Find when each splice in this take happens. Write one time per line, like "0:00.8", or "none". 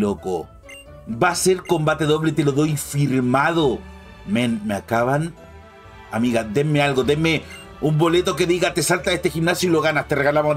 none